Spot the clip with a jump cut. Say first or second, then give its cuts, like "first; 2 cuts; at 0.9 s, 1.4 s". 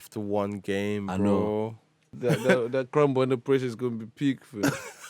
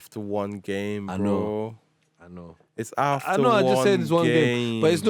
first; 1 cut; at 2.1 s